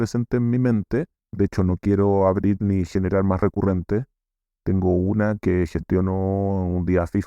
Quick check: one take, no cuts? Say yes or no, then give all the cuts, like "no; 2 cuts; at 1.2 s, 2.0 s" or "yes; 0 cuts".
no; 1 cut; at 1.2 s